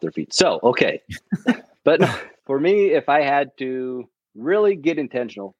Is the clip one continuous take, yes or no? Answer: no